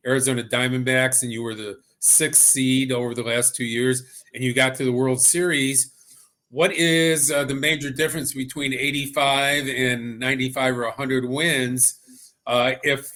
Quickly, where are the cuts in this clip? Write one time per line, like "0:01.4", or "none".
none